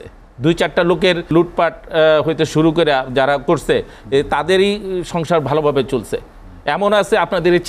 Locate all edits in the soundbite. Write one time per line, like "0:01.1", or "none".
0:01.3